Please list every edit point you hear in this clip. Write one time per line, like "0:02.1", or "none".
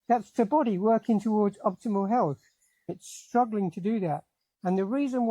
0:02.9